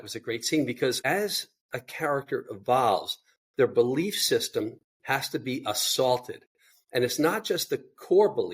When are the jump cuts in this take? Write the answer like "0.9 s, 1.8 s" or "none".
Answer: 1.0 s